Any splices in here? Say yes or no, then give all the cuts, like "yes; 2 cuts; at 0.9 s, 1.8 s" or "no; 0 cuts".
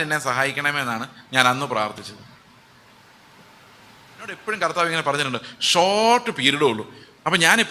yes; 1 cut; at 4.4 s